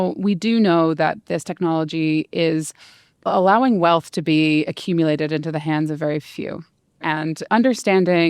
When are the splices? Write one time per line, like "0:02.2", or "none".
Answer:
0:03.3
0:07.1

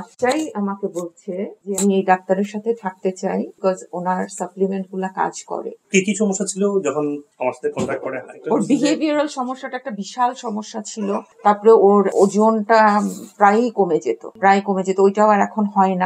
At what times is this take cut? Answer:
none

